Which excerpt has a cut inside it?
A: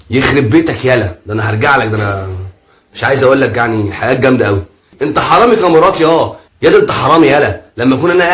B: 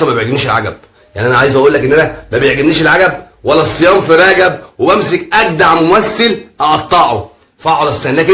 A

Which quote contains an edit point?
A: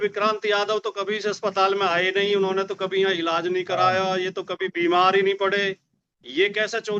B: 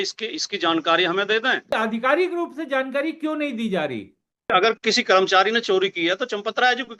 B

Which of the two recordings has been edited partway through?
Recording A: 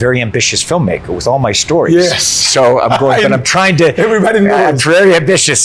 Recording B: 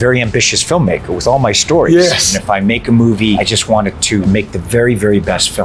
B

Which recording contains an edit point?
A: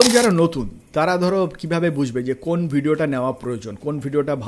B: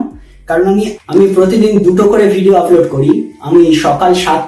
B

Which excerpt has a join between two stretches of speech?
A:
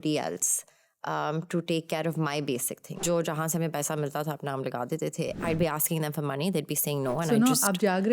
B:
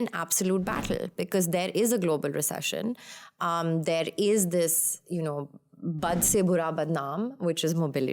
A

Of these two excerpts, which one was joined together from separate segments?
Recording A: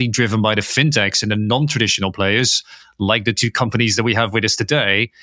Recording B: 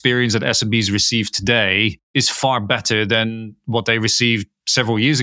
B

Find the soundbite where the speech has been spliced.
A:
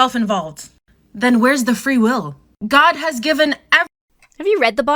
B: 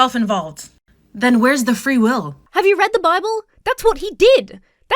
B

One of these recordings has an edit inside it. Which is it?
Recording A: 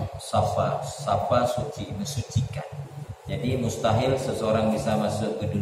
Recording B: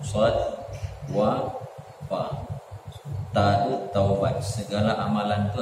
A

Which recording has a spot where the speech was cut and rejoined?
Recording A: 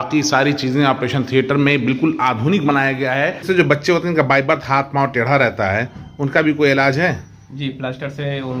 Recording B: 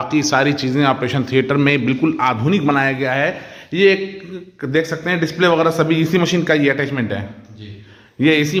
A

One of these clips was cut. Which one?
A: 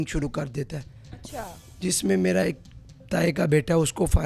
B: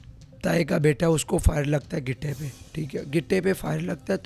B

